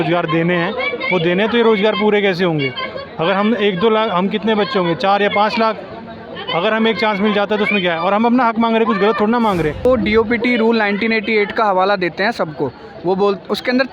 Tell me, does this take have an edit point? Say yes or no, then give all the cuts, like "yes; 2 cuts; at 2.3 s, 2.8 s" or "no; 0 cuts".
yes; 1 cut; at 9.8 s